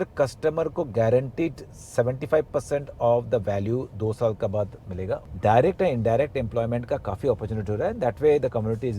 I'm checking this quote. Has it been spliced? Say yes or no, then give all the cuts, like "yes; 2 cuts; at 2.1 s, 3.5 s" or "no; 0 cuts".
yes; 1 cut; at 5.3 s